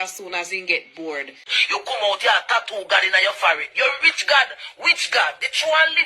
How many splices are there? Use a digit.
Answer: 1